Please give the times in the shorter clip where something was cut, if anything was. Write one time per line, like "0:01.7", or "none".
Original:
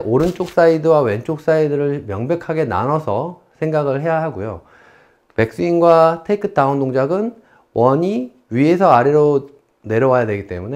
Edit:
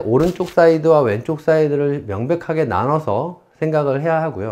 none

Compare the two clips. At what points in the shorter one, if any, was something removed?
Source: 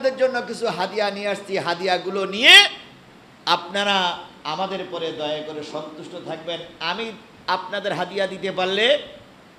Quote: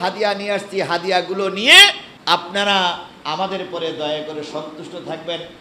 0:02.1

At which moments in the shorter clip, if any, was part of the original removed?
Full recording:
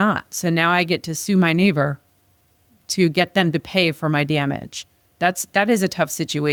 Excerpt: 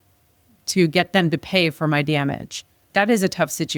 0:02.8

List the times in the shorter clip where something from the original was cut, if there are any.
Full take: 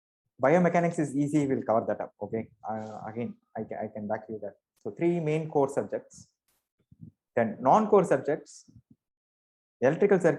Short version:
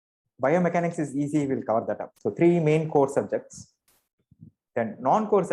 0:02.1

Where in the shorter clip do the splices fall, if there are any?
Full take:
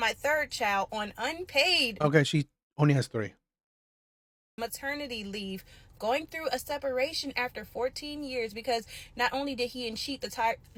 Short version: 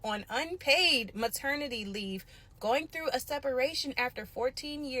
0:01.1

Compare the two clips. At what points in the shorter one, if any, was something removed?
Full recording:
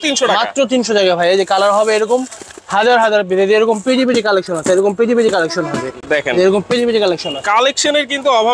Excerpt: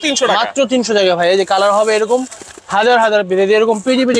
none

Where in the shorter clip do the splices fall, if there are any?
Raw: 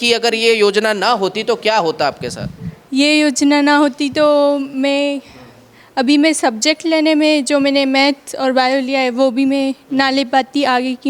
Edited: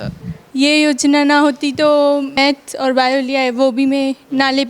0:02.4

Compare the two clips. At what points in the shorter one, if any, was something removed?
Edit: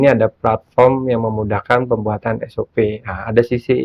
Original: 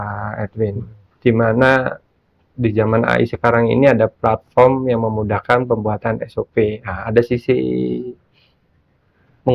none

